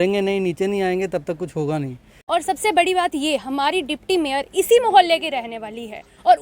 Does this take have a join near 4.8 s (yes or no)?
no